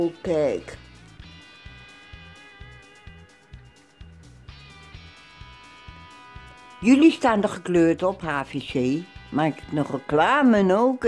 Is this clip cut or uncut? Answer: uncut